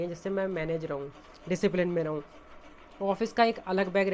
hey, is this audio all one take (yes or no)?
yes